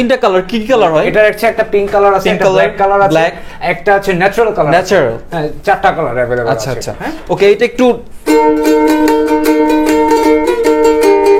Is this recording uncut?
yes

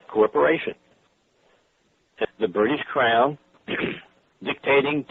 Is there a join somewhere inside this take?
no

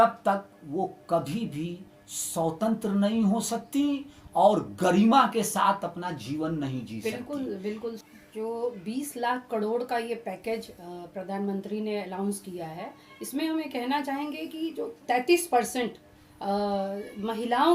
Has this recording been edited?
yes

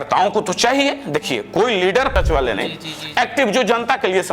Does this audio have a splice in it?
yes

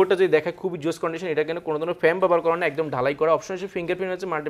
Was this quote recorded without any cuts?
yes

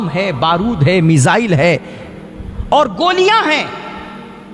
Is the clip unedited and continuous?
yes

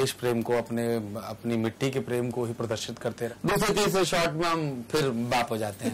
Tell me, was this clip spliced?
yes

